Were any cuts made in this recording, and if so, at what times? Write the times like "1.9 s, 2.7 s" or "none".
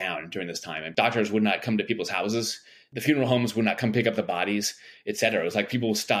0.9 s